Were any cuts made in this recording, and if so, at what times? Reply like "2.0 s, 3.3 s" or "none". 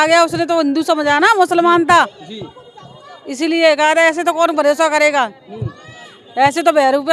none